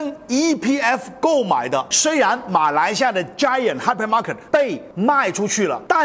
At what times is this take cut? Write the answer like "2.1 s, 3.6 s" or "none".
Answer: 1.9 s